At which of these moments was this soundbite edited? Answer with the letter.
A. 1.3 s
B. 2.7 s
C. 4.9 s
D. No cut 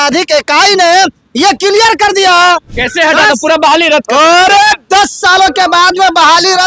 B